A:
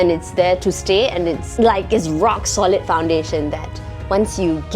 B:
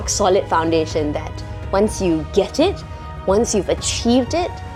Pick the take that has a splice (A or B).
A